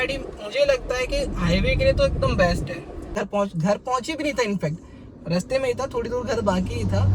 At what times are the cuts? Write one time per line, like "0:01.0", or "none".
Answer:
0:03.1